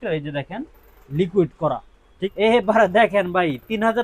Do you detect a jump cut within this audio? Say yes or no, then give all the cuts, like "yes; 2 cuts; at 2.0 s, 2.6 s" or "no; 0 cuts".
yes; 1 cut; at 2.1 s